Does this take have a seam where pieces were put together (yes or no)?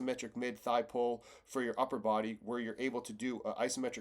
no